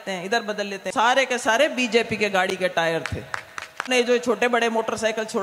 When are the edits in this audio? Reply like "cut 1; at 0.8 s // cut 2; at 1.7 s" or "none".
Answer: cut 1; at 0.9 s // cut 2; at 3.8 s